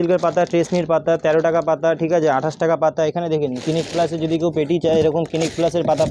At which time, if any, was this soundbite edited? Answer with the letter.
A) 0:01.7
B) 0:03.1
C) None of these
C